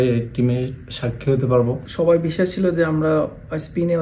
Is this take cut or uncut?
cut